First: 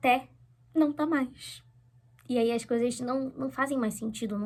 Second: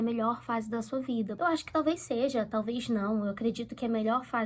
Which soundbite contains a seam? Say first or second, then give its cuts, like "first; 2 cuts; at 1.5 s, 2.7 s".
second; 1 cut; at 1.3 s